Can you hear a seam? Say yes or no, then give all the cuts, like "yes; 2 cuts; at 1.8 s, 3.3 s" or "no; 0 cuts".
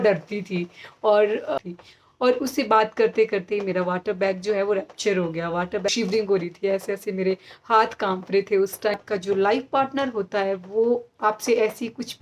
yes; 3 cuts; at 1.6 s, 5.9 s, 9.0 s